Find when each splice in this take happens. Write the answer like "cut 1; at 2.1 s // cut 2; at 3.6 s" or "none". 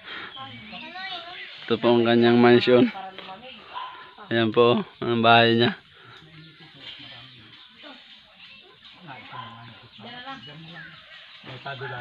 none